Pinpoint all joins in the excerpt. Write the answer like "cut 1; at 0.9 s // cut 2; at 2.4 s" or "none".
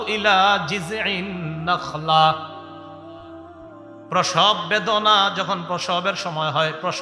cut 1; at 2.6 s // cut 2; at 4.1 s